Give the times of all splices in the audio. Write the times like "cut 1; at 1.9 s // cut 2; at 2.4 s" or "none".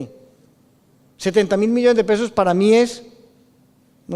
none

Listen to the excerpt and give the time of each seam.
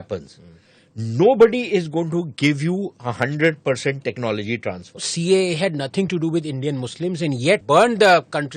cut 1; at 5.1 s // cut 2; at 7.6 s

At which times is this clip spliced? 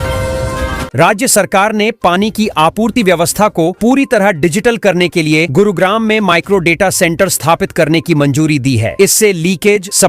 cut 1; at 0.9 s

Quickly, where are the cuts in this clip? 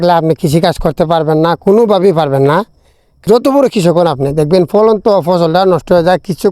cut 1; at 3.1 s

